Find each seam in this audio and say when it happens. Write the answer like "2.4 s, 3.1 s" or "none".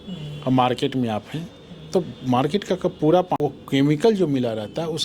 3.4 s